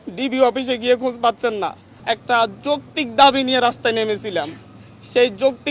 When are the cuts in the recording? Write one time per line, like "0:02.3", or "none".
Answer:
0:01.9